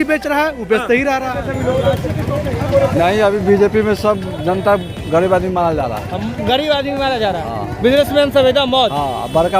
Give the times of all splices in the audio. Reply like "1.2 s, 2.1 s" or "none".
1.3 s